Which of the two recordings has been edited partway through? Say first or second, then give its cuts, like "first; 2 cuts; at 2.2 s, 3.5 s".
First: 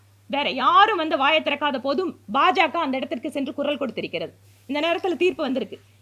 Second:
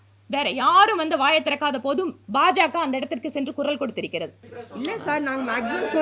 second; 1 cut; at 4.5 s